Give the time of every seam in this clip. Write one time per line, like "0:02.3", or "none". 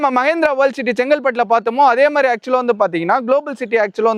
none